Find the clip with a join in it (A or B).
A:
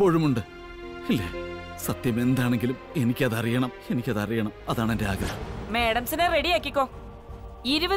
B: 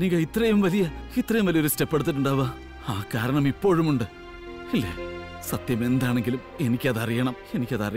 A